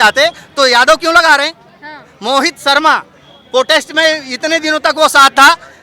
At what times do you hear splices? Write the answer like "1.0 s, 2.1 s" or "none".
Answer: none